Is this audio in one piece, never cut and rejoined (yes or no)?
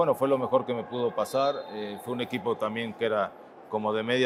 yes